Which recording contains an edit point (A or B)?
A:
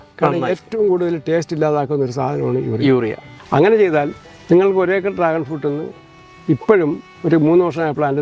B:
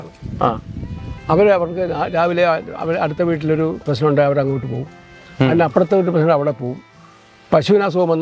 A